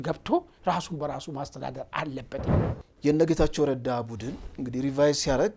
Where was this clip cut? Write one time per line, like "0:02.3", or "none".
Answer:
0:02.3